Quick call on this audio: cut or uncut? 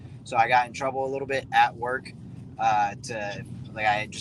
uncut